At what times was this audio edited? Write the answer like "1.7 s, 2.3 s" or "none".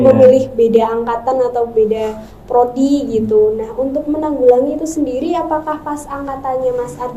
none